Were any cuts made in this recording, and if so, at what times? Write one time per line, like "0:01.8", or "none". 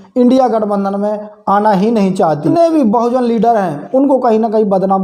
0:02.5